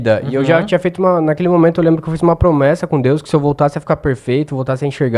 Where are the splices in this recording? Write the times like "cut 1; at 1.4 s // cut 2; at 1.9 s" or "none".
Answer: none